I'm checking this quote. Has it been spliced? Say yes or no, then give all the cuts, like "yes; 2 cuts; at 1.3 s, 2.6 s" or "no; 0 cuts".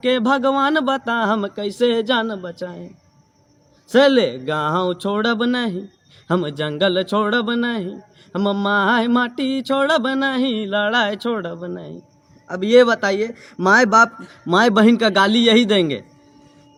no; 0 cuts